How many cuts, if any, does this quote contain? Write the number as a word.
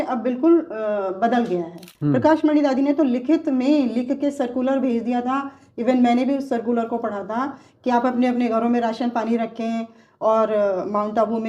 one